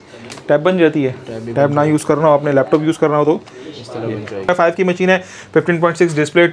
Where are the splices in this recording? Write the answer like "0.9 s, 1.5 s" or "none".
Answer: 4.5 s